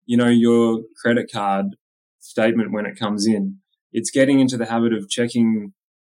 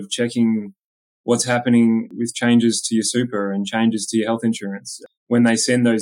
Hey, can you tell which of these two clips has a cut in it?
second; 2 cuts; at 2.1 s, 5.0 s

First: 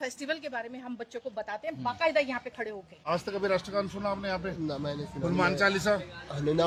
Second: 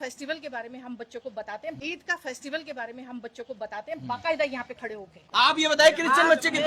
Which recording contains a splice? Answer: second; 3 cuts; at 1.8 s, 4.0 s, 5.2 s

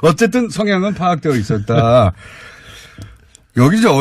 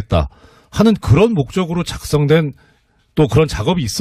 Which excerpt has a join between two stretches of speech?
first; 1 cut; at 1.0 s

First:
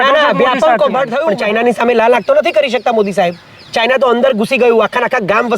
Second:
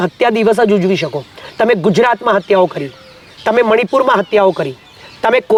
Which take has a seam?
first; 1 cut; at 1.2 s

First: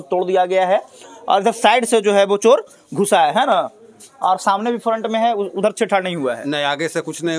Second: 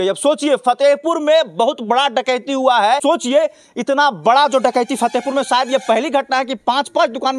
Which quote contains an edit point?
second; 1 cut; at 3.0 s

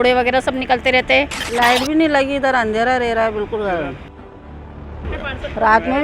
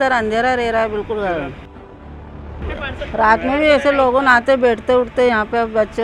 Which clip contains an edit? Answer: first; 1 cut; at 1.4 s

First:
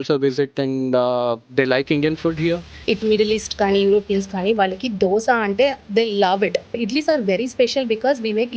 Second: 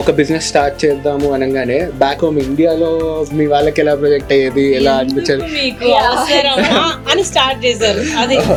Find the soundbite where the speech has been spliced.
first; 2 cuts; at 2.7 s, 6.8 s

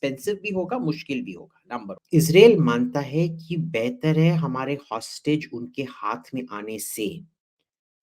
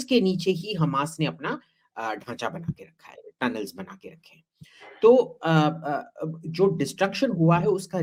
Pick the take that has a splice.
first; 1 cut; at 1.9 s

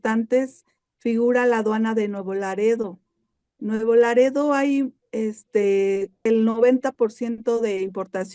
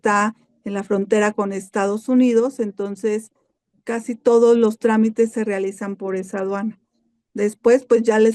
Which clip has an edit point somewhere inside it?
first; 1 cut; at 6.3 s

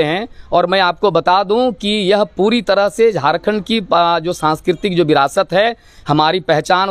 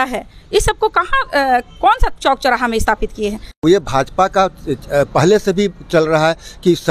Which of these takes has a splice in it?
second; 1 cut; at 3.6 s

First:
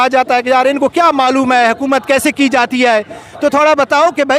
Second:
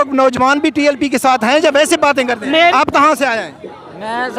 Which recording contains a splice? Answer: second; 1 cut; at 2.7 s

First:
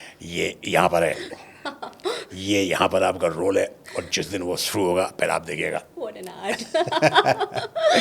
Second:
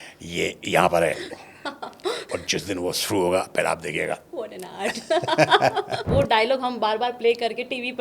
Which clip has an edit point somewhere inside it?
second; 2 cuts; at 2.3 s, 6.1 s

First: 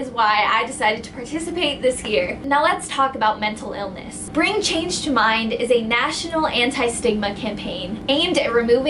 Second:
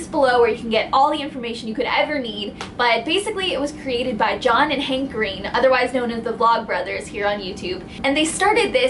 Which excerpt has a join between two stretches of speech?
second; 1 cut; at 6.1 s

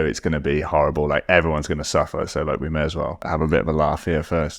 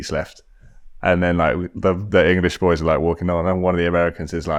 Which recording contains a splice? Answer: first; 1 cut; at 3.2 s

